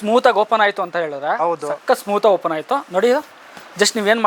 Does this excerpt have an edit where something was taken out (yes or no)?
no